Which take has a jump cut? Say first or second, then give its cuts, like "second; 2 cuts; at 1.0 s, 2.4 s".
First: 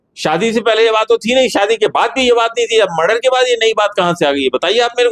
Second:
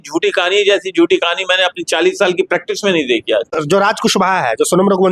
second; 1 cut; at 3.5 s